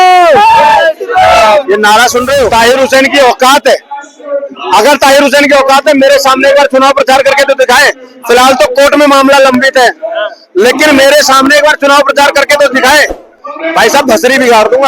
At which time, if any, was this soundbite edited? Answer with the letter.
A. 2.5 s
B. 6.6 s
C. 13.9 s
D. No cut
A